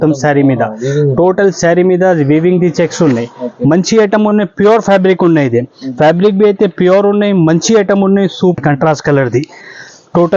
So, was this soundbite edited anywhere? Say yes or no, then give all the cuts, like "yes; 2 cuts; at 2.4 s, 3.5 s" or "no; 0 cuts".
yes; 1 cut; at 8.6 s